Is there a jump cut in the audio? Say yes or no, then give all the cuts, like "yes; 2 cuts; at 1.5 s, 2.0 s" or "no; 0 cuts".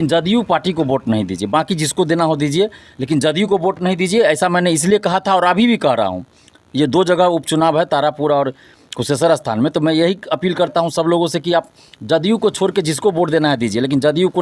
no; 0 cuts